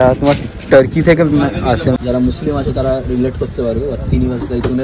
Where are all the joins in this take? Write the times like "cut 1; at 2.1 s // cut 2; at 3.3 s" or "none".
cut 1; at 2.0 s